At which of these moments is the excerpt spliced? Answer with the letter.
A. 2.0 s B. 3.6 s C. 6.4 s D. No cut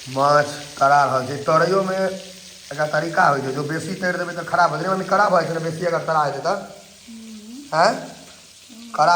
D